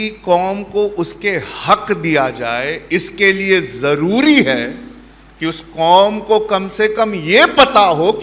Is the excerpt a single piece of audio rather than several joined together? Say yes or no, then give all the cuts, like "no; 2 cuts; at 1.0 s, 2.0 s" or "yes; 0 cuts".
yes; 0 cuts